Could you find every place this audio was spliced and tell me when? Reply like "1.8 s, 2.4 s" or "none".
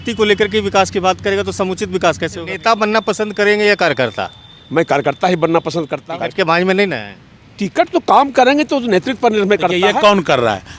2.5 s, 6.0 s, 9.7 s